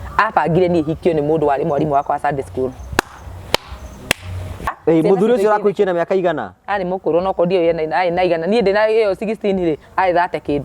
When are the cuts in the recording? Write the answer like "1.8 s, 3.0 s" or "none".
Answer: 4.8 s

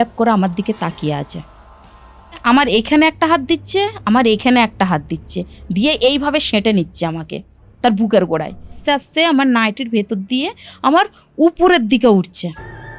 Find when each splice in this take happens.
2.4 s, 8.7 s

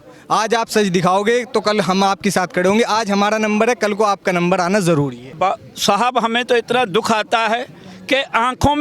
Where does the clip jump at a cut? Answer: 5.3 s

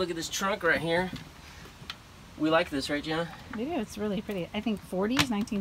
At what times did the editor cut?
none

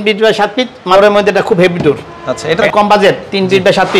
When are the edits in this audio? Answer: 0.9 s, 2.6 s

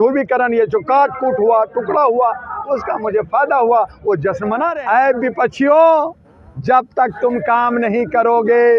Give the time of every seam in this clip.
4.7 s

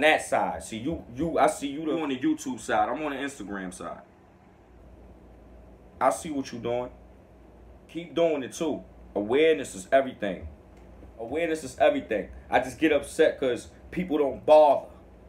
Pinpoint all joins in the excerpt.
1.8 s, 8.1 s, 11.3 s

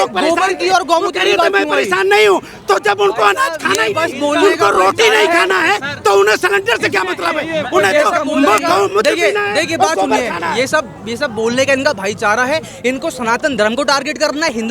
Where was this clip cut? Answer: none

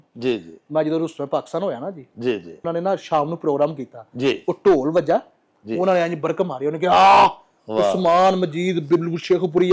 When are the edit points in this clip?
none

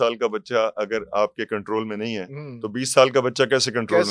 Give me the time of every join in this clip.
none

